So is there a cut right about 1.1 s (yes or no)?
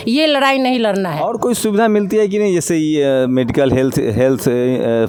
no